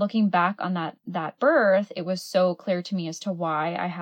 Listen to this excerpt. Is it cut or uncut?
cut